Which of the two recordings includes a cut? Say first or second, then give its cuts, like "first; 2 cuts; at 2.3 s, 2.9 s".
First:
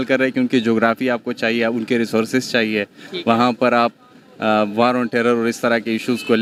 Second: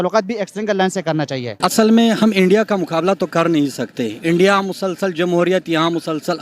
second; 1 cut; at 1.4 s